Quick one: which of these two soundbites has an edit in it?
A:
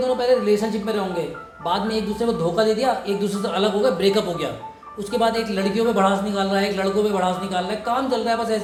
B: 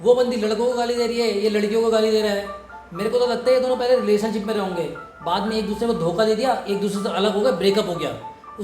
B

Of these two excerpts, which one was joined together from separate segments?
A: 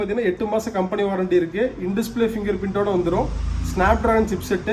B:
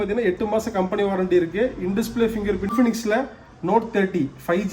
B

